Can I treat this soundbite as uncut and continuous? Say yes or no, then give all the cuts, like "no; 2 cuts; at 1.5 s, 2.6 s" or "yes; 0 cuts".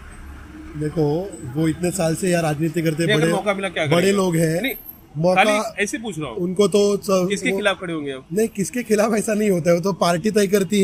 yes; 0 cuts